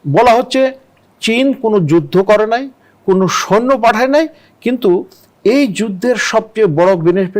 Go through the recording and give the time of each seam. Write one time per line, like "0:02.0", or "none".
none